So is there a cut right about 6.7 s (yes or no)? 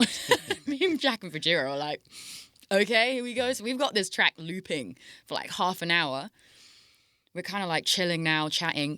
no